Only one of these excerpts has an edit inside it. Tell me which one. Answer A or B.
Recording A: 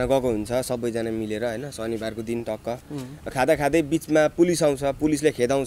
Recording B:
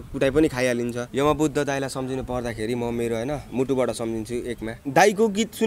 B